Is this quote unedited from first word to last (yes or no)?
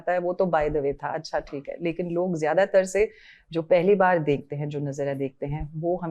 yes